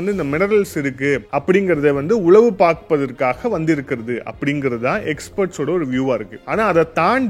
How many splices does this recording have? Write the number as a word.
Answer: two